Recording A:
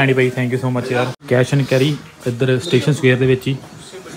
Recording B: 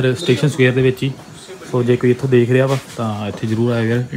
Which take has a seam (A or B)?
A